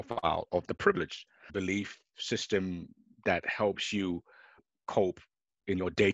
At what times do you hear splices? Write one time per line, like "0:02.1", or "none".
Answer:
0:01.5
0:04.7